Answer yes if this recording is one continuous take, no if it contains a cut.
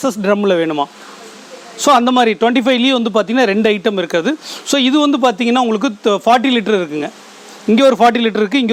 yes